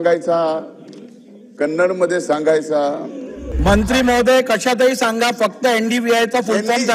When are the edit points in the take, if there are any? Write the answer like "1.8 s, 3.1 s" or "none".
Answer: 3.5 s